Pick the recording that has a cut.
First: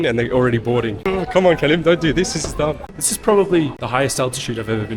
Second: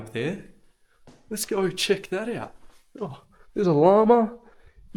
first; 3 cuts; at 1.0 s, 2.8 s, 3.8 s

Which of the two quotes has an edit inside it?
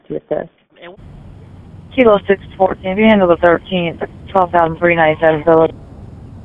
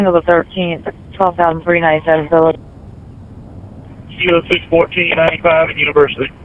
first; 1 cut; at 0.9 s

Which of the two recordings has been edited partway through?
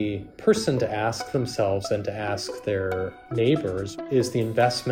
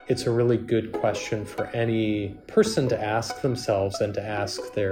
first; 1 cut; at 3.9 s

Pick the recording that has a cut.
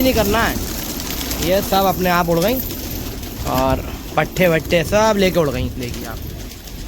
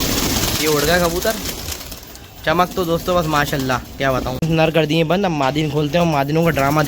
second; 1 cut; at 4.3 s

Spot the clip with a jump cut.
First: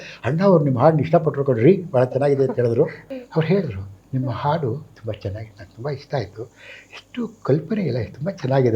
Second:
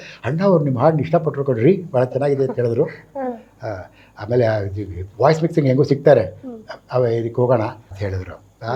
first; 1 cut; at 3.0 s

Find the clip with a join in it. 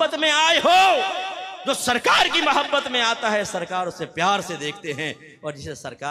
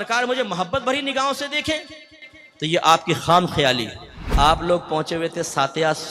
second; 1 cut; at 4.2 s

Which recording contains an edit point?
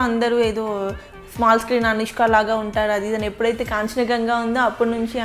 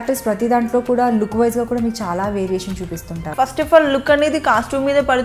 second; 1 cut; at 3.3 s

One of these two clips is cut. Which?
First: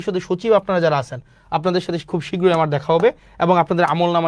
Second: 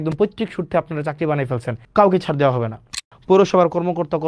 second; 2 cuts; at 1.8 s, 2.9 s

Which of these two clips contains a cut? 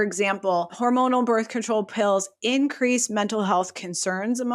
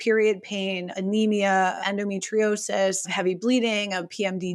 second; 3 cuts; at 0.9 s, 1.8 s, 3.1 s

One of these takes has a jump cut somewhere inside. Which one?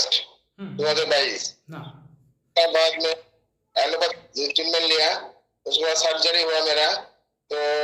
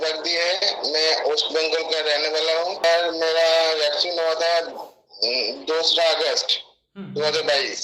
second; 1 cut; at 2.8 s

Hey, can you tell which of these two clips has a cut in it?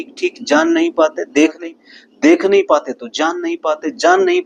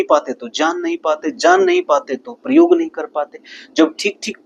first; 1 cut; at 1.6 s

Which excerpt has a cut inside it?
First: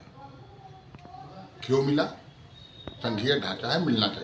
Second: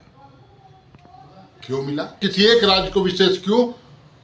second; 1 cut; at 2.3 s

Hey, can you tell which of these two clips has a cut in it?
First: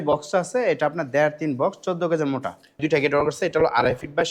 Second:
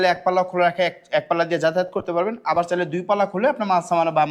first; 1 cut; at 2.8 s

